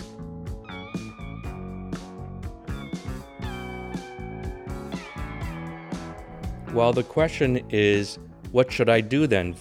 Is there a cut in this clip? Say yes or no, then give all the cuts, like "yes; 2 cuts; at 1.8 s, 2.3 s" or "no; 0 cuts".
no; 0 cuts